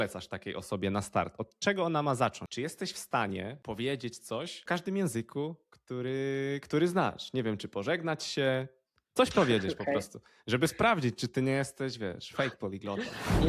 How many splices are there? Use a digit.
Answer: 3